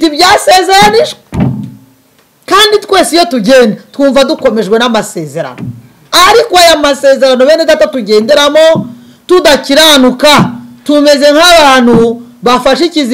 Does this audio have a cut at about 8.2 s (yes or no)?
no